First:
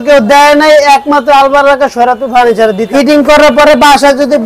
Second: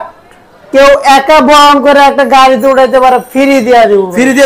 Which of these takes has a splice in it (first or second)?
first